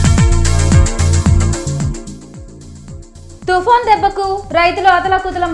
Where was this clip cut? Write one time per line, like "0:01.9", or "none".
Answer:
0:03.1